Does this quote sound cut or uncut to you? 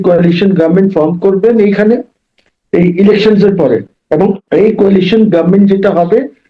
cut